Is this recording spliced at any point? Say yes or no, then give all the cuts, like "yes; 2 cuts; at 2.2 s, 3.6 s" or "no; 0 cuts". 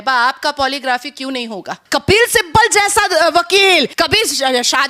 yes; 2 cuts; at 1.8 s, 3.9 s